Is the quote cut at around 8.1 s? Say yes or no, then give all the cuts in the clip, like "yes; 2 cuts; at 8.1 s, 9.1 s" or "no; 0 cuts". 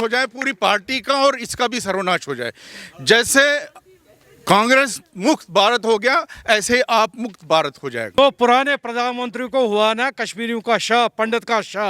yes; 1 cut; at 8.1 s